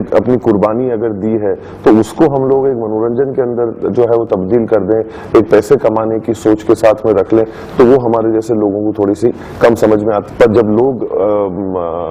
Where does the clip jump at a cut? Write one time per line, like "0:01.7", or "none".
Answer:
0:10.2